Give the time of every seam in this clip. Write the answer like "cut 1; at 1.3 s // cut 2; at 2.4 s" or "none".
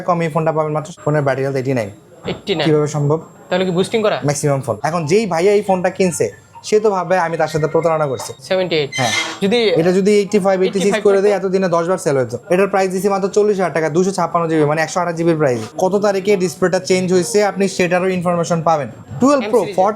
cut 1; at 0.9 s // cut 2; at 3.3 s // cut 3; at 4.7 s // cut 4; at 8.3 s // cut 5; at 12.4 s // cut 6; at 15.7 s // cut 7; at 19.0 s